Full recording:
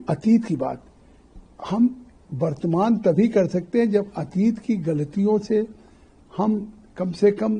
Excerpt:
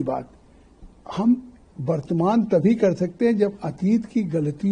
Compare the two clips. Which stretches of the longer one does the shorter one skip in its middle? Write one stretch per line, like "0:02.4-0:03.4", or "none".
none